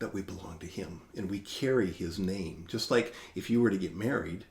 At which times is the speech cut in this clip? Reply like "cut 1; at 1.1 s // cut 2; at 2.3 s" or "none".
none